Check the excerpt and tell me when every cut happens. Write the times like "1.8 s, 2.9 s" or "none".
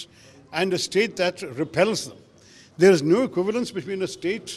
none